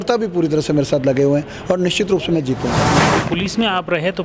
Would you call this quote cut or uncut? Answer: cut